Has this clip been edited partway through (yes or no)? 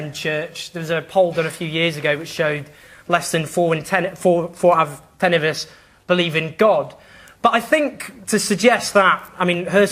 yes